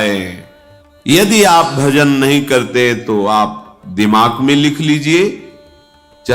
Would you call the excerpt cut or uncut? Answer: cut